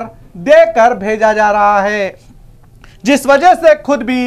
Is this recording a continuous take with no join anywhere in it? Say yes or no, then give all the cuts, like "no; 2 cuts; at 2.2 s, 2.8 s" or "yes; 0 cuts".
yes; 0 cuts